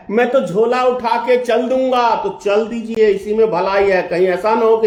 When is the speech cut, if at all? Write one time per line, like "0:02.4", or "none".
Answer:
none